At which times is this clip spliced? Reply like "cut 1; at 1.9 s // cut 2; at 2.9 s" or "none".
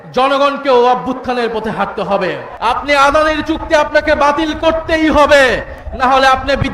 cut 1; at 2.5 s